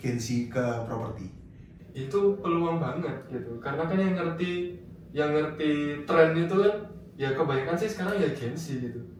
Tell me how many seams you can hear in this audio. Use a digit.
0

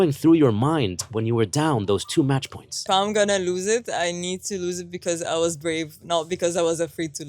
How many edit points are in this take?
1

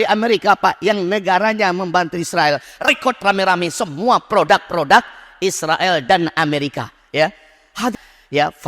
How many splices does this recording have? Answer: 2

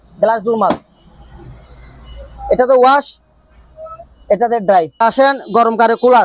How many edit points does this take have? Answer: 1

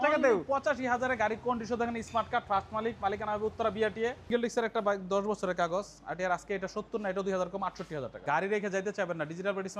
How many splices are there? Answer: 2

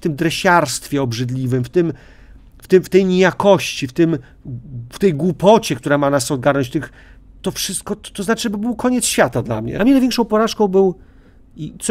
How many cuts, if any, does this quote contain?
1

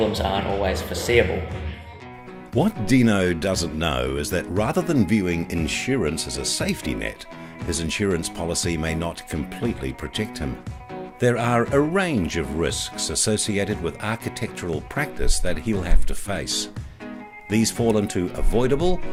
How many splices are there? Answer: 0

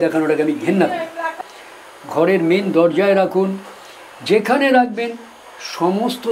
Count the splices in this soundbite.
1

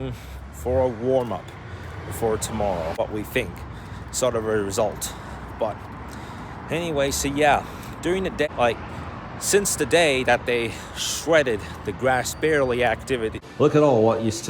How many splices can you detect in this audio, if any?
3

